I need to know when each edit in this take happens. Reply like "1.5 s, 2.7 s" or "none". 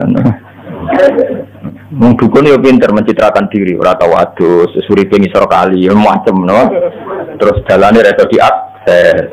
1.5 s